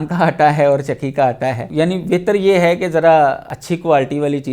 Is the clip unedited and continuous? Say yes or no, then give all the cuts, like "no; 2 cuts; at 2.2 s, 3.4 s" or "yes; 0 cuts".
no; 2 cuts; at 1.6 s, 3.5 s